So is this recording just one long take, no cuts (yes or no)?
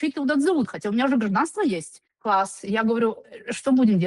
yes